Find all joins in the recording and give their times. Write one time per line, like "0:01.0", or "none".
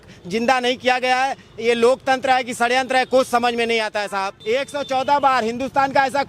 0:04.3